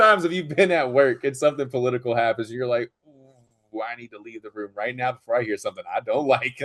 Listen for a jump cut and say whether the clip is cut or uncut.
uncut